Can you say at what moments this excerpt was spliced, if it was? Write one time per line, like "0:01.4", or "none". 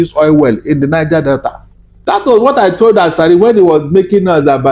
0:02.2